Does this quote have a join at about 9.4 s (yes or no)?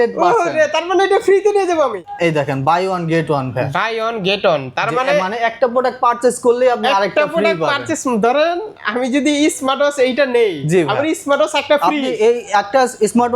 no